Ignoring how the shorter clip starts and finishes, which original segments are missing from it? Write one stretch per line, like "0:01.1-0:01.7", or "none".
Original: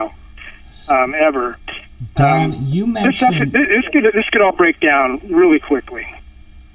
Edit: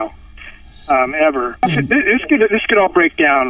0:01.7-0:03.4